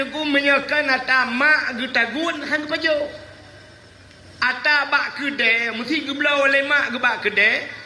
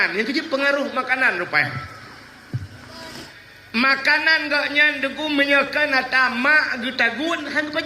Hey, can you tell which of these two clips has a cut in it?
second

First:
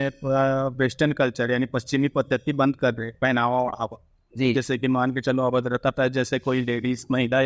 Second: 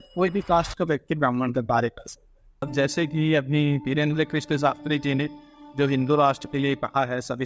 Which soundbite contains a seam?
second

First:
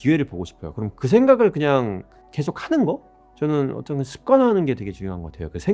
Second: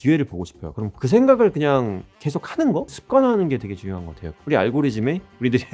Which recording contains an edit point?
second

